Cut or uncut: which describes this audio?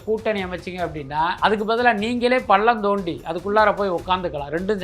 cut